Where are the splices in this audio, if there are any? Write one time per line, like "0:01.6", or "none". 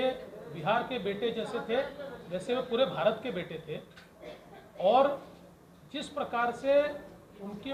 none